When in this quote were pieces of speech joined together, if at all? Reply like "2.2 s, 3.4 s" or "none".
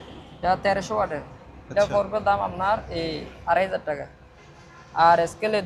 none